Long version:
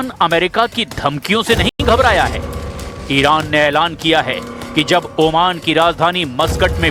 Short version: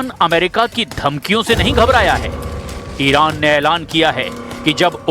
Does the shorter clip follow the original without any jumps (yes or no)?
no